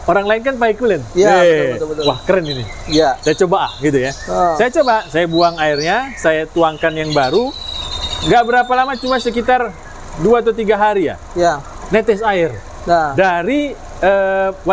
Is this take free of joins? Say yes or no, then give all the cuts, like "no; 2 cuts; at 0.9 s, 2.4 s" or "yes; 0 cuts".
yes; 0 cuts